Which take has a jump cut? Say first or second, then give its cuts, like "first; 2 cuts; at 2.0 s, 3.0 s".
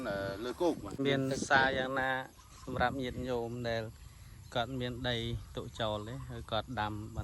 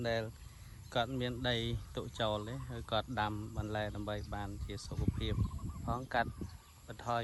first; 1 cut; at 1.0 s